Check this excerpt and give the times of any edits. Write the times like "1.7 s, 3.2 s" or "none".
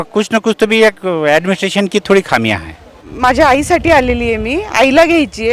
3.0 s